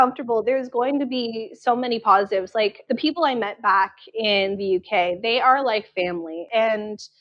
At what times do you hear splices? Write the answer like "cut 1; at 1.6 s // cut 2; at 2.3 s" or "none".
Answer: cut 1; at 2.8 s // cut 2; at 6.4 s